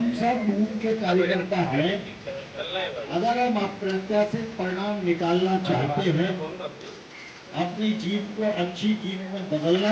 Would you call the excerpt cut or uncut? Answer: uncut